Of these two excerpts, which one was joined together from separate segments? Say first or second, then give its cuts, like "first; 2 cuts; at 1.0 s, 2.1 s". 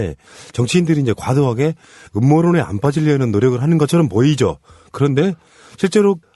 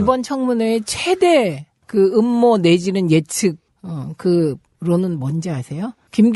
first; 1 cut; at 2.0 s